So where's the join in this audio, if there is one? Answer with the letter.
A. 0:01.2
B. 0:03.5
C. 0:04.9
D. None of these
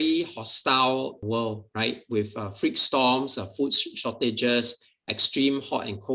A